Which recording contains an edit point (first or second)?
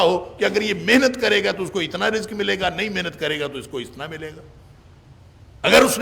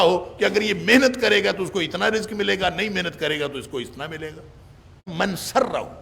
second